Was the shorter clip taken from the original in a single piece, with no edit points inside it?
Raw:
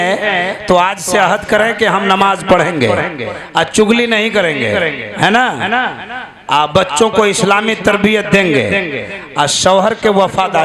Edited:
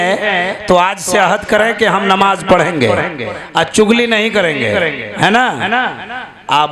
yes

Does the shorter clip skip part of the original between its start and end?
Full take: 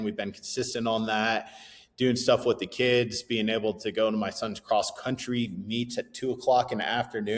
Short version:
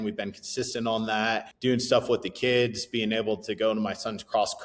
yes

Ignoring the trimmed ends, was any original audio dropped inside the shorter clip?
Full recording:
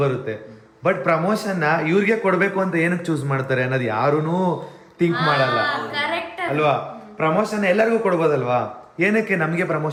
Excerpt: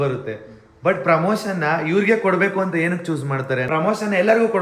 yes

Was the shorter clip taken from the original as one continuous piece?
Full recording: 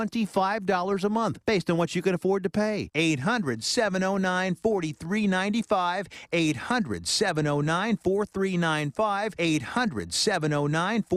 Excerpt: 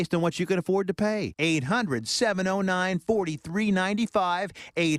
yes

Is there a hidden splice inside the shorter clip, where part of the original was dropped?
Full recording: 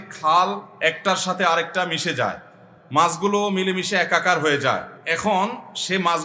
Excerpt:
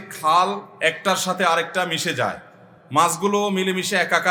no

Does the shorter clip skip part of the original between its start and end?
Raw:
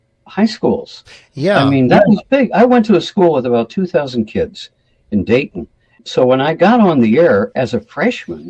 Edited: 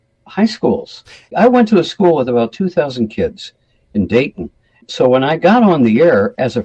yes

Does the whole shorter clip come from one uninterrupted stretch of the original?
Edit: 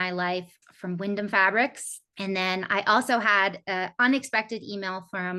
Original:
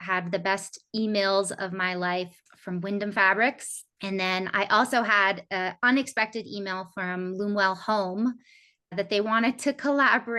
yes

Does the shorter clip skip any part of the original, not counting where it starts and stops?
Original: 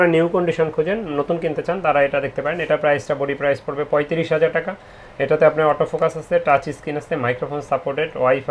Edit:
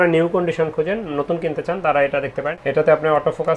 yes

